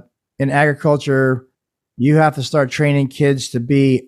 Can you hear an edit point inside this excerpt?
no; 0 cuts

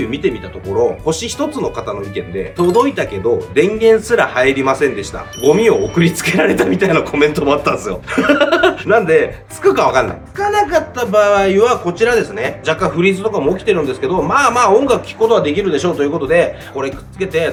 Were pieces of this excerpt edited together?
no; 0 cuts

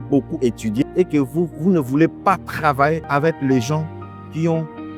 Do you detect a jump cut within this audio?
yes; 1 cut; at 3.0 s

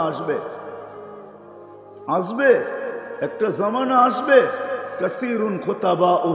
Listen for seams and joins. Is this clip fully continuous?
yes; 0 cuts

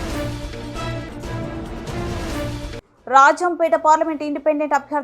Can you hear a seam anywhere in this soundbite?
yes; 2 cuts; at 1.3 s, 2.6 s

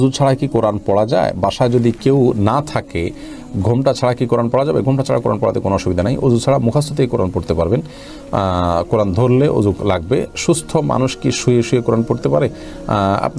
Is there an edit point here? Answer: no; 0 cuts

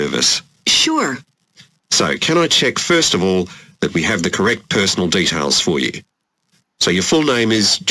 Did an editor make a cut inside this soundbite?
no; 0 cuts

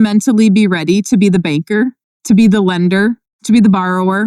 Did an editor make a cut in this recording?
yes; 2 cuts; at 2.1 s, 3.3 s

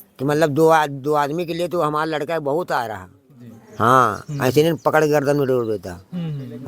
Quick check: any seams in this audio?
no; 0 cuts

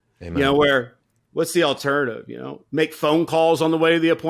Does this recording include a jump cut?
no; 0 cuts

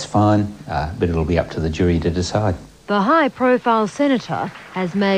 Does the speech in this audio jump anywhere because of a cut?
no; 0 cuts

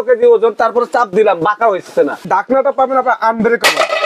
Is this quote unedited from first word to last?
no; 1 cut; at 2.2 s

